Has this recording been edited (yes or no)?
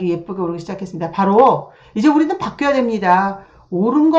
no